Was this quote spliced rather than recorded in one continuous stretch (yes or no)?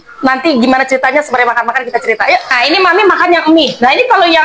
yes